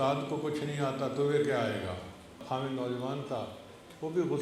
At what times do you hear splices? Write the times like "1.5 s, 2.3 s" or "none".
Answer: 2.4 s